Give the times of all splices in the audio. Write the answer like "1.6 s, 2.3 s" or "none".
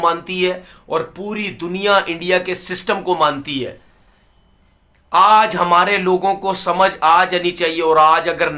none